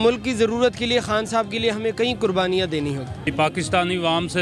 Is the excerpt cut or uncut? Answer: cut